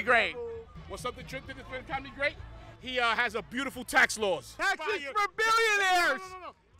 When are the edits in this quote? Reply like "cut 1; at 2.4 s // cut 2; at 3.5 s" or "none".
none